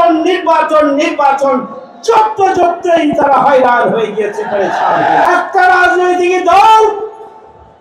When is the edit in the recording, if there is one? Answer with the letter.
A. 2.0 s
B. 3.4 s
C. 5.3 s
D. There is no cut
C